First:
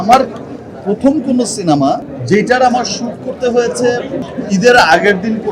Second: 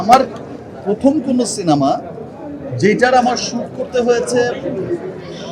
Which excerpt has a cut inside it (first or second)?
first